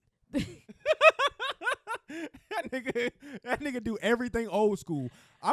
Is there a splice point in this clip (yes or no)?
no